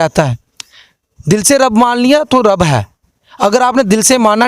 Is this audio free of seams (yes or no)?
yes